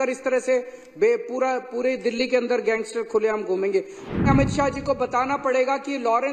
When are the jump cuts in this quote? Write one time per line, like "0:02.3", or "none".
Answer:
0:04.1